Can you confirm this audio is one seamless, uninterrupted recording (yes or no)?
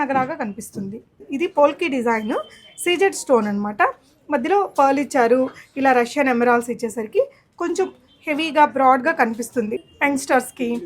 no